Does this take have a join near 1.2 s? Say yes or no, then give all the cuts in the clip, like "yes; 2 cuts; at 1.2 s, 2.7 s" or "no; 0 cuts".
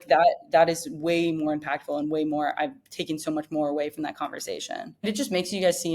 no; 1 cut; at 5.0 s